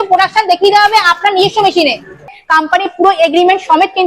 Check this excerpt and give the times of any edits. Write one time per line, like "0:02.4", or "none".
0:02.4